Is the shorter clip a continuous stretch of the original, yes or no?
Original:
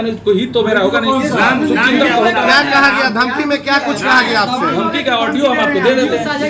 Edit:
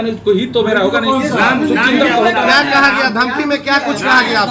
yes